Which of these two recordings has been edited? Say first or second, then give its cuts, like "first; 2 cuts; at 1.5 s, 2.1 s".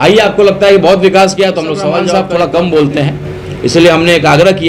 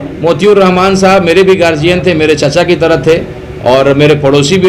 first; 1 cut; at 2.0 s